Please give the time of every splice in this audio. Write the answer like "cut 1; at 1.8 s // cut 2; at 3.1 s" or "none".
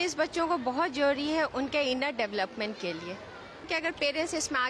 cut 1; at 3.7 s